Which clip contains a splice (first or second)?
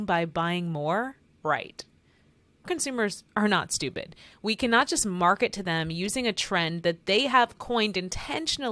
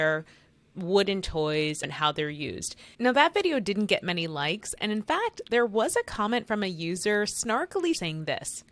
first